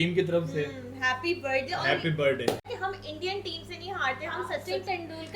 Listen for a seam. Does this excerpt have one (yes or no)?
yes